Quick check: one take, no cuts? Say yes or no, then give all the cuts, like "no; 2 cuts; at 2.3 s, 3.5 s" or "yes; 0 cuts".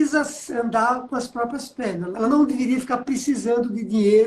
no; 1 cut; at 2.2 s